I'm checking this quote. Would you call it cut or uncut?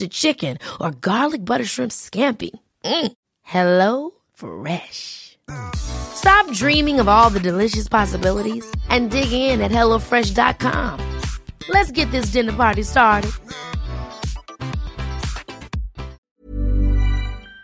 cut